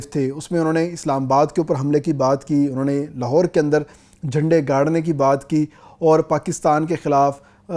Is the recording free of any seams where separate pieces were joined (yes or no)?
yes